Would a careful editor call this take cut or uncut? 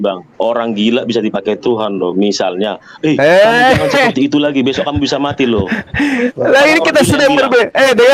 uncut